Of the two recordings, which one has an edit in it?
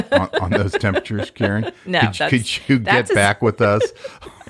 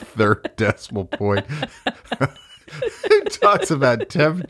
second; 1 cut; at 2.6 s

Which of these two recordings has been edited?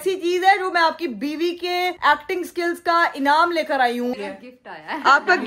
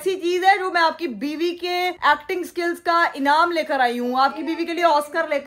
first; 1 cut; at 4.1 s

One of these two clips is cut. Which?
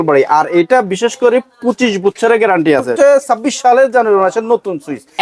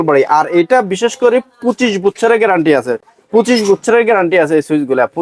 first; 1 cut; at 2.9 s

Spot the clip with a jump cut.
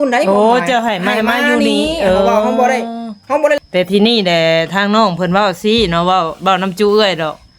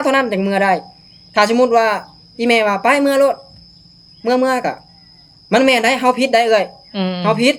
first; 1 cut; at 3.6 s

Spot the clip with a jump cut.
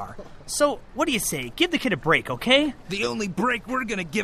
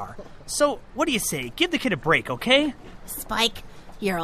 first; 1 cut; at 2.9 s

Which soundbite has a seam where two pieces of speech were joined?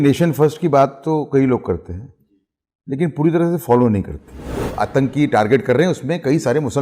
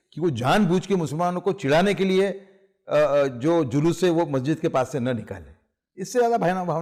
first; 1 cut; at 4.7 s

